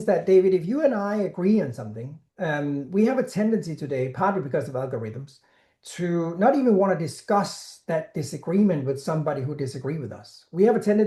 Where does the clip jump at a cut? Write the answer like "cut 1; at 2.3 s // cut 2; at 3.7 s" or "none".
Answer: none